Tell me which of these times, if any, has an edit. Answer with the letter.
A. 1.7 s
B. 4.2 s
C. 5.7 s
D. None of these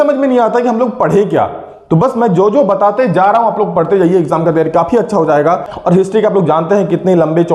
C